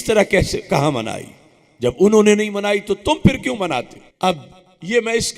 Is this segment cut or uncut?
cut